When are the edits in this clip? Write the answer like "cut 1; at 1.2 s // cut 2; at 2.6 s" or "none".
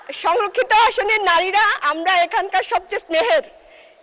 none